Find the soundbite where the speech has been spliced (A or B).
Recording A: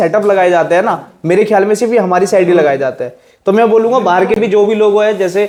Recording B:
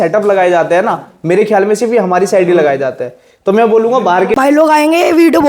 B